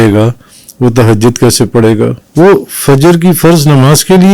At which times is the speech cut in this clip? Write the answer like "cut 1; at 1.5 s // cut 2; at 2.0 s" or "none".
cut 1; at 2.2 s